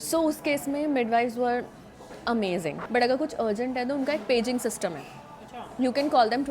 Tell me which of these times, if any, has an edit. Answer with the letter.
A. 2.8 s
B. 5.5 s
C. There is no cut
A